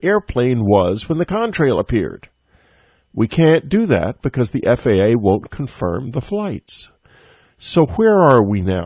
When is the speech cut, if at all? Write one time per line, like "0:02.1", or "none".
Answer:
none